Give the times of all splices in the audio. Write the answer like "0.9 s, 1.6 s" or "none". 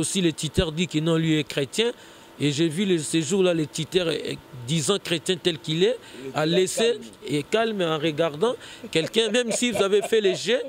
none